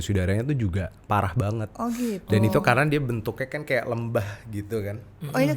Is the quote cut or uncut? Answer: uncut